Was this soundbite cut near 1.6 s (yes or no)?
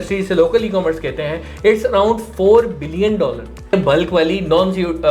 no